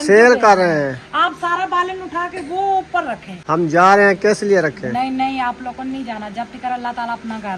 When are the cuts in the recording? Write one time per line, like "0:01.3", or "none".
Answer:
0:03.3